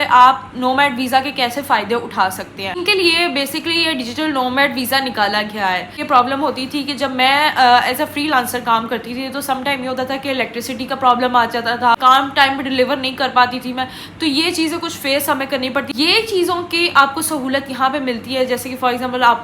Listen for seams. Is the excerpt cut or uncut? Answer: cut